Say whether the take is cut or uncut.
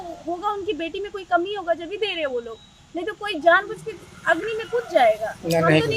uncut